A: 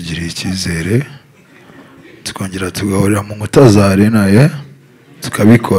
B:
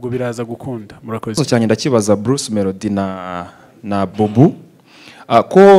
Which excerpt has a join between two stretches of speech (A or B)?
B